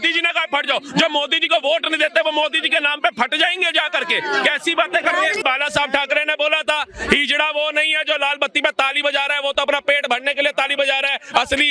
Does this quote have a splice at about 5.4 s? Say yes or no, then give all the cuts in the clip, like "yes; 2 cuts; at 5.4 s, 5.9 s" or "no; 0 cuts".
yes; 1 cut; at 5.4 s